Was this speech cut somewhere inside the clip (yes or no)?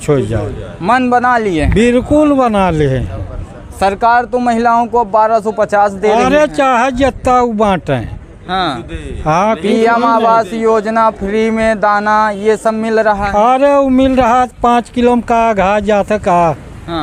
no